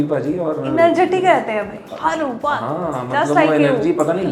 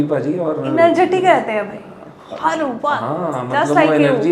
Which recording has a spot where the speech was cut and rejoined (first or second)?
first